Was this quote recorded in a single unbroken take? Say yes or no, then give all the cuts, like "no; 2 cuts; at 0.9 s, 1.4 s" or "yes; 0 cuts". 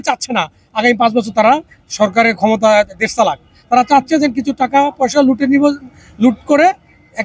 yes; 0 cuts